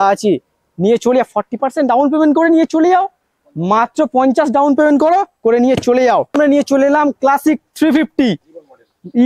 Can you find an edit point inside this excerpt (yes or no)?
no